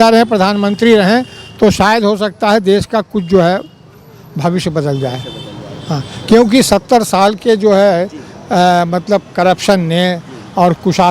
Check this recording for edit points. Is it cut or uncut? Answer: uncut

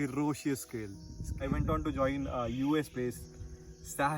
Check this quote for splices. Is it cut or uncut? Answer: cut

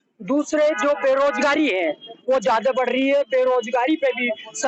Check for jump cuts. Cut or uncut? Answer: uncut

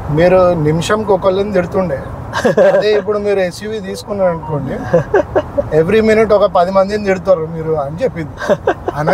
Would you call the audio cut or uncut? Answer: uncut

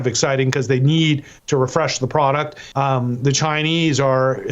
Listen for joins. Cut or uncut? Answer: cut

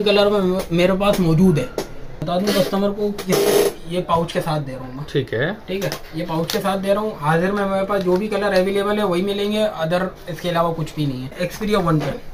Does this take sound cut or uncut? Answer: cut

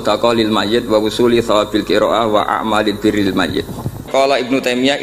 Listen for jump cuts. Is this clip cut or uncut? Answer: cut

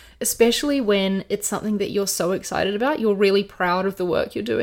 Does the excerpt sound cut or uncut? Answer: uncut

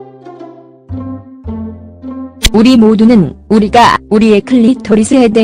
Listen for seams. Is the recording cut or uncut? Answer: cut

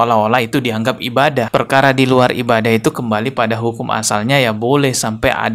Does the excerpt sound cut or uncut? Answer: uncut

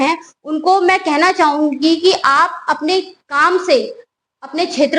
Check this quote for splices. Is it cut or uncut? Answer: uncut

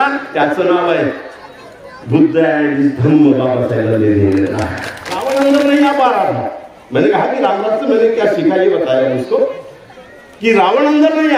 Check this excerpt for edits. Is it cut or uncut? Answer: cut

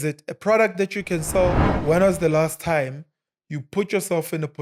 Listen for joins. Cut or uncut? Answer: cut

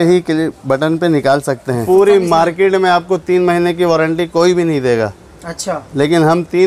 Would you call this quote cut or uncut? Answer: cut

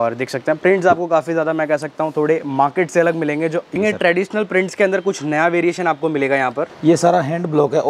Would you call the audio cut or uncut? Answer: cut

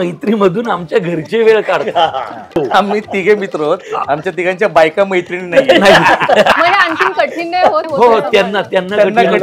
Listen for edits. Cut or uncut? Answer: cut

